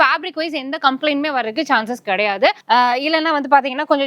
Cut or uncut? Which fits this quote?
cut